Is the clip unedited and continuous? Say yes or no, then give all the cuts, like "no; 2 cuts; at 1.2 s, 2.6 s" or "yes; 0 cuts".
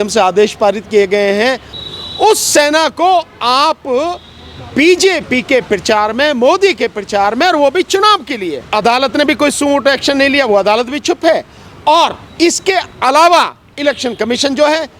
no; 3 cuts; at 1.7 s, 8.6 s, 12.2 s